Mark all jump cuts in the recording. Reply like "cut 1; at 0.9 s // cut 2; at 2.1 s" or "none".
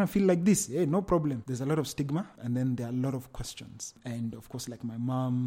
cut 1; at 1.4 s